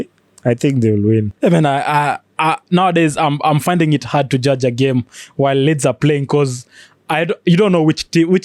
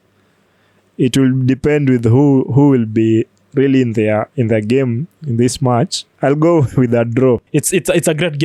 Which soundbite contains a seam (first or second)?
second